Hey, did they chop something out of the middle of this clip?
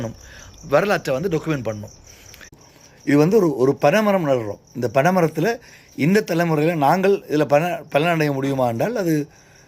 yes; 1 cut; at 2.6 s

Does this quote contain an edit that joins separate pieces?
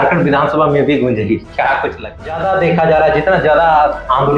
yes; 1 cut; at 2.4 s

